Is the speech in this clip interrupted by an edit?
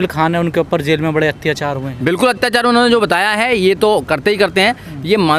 no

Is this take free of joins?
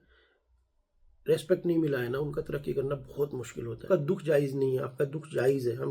no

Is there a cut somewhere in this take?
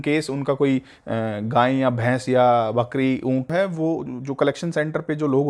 yes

